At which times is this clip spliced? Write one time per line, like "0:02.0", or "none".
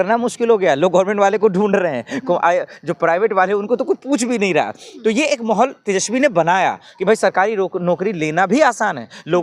none